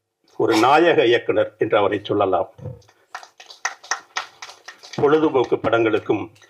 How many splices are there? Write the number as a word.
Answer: zero